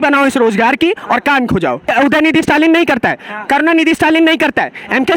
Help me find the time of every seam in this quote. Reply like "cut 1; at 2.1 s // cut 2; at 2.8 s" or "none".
cut 1; at 1.9 s